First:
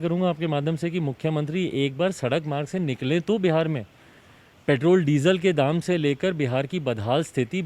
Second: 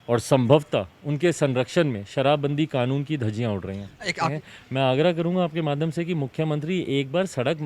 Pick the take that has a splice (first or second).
second